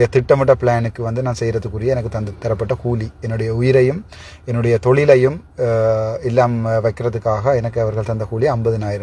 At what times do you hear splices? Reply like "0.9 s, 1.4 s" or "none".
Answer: none